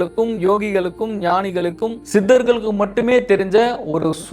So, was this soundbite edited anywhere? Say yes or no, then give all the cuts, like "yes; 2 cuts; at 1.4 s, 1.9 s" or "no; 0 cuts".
yes; 1 cut; at 2.0 s